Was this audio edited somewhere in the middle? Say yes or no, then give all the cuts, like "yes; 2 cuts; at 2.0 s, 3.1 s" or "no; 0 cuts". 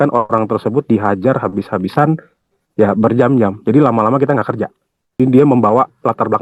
yes; 1 cut; at 5.0 s